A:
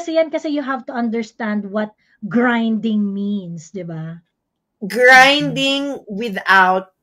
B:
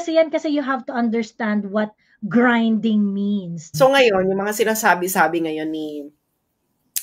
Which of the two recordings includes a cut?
B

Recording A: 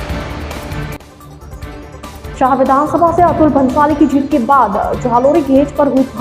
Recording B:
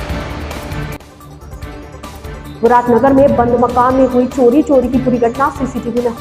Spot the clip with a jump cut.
A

